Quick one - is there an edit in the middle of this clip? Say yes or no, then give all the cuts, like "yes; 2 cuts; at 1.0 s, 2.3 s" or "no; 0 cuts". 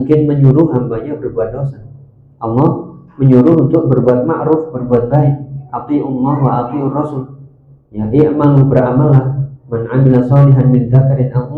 no; 0 cuts